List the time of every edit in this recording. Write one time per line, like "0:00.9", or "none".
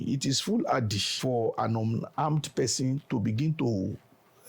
0:01.0